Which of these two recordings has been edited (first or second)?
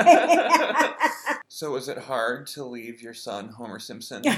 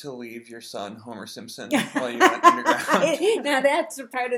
first